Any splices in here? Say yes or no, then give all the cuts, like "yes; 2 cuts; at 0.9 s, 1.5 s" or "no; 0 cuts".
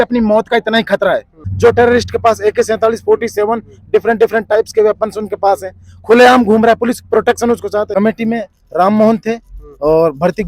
yes; 2 cuts; at 1.4 s, 7.9 s